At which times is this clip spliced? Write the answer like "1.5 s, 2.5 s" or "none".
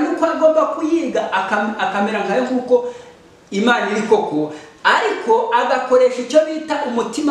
none